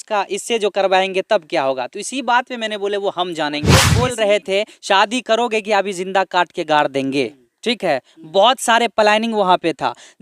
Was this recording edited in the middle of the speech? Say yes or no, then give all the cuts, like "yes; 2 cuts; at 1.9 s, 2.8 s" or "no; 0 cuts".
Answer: yes; 1 cut; at 3.9 s